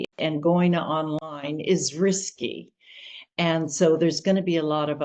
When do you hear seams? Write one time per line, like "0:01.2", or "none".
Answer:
none